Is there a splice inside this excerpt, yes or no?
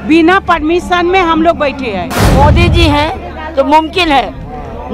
yes